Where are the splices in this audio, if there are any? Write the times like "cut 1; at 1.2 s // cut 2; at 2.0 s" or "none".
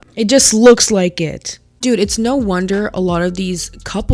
cut 1; at 1.7 s